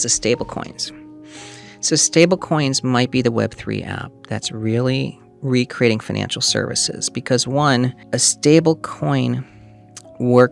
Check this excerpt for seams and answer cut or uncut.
cut